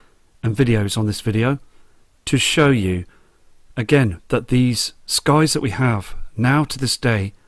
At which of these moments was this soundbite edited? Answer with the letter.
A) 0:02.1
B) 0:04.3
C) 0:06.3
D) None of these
D